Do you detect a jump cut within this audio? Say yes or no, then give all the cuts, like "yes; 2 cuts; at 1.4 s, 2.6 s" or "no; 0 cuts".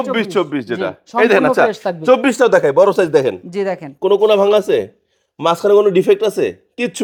no; 0 cuts